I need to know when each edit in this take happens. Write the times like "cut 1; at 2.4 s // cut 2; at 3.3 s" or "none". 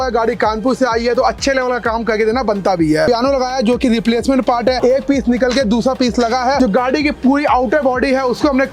cut 1; at 3.1 s // cut 2; at 6.6 s